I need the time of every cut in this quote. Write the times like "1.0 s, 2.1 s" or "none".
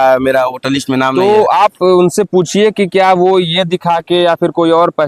none